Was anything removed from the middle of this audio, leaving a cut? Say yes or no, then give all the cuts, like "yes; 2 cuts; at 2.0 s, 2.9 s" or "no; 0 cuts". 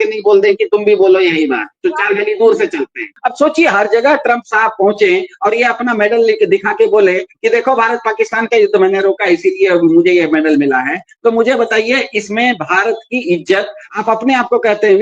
yes; 2 cuts; at 3.1 s, 13.9 s